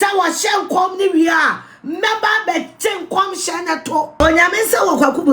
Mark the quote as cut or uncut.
cut